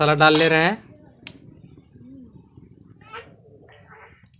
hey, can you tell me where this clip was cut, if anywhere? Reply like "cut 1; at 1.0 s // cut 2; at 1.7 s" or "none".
cut 1; at 3.1 s